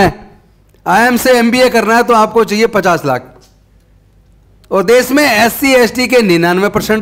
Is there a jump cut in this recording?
no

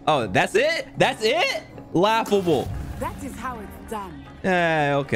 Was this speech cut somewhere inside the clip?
no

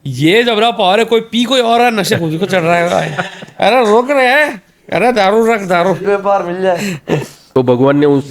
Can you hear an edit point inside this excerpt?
yes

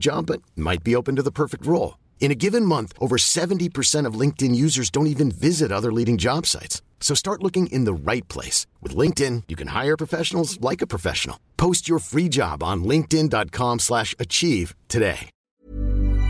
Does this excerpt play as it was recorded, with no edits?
no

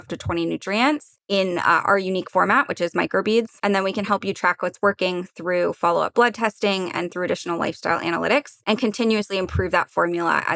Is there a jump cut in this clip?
yes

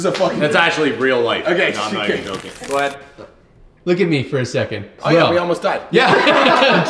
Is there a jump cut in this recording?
yes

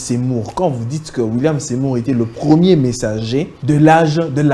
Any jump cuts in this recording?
yes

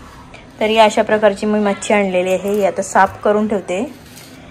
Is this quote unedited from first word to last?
yes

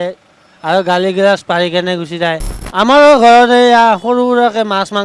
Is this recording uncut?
no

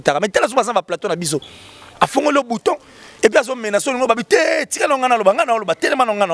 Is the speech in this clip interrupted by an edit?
no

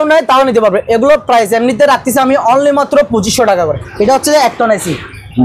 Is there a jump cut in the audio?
yes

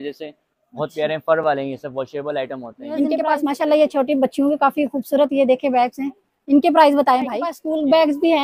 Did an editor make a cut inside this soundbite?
yes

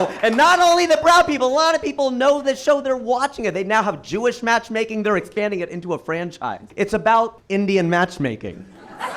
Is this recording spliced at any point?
yes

